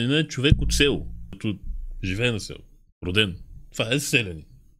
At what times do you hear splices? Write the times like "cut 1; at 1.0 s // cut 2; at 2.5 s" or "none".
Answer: cut 1; at 1.4 s